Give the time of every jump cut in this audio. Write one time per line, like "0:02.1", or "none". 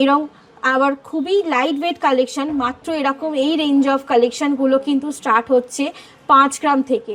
none